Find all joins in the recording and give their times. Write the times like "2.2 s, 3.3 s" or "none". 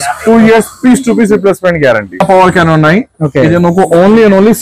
2.1 s